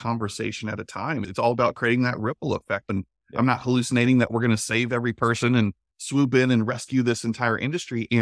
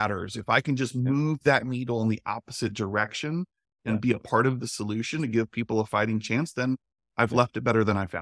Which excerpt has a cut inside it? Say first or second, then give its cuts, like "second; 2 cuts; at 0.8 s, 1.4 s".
first; 2 cuts; at 1.3 s, 2.9 s